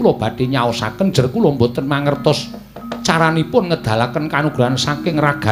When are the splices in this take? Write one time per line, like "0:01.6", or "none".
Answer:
none